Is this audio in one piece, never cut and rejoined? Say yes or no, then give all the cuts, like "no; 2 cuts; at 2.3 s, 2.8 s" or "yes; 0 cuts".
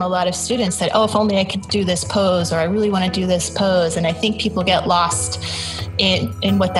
yes; 0 cuts